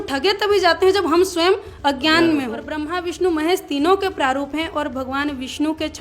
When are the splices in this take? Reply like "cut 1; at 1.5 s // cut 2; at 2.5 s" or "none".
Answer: cut 1; at 2.8 s